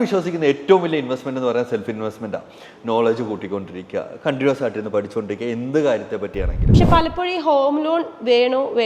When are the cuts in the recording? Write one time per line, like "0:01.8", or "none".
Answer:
0:06.6